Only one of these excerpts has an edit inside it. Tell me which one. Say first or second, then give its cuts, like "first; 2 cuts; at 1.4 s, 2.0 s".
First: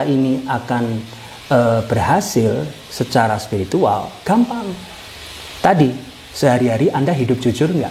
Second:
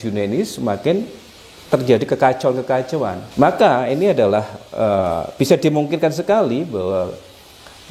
second; 1 cut; at 3.2 s